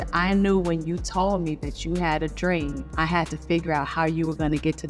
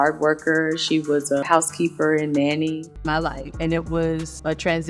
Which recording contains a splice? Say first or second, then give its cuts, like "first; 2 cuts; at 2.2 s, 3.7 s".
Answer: second; 1 cut; at 2.9 s